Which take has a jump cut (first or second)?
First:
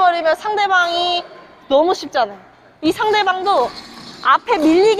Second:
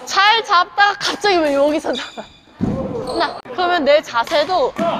second